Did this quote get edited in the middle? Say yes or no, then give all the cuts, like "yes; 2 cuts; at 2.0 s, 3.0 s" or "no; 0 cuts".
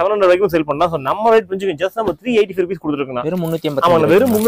no; 0 cuts